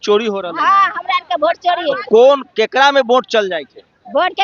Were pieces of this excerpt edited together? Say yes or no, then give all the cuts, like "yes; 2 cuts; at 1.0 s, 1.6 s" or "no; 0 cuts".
no; 0 cuts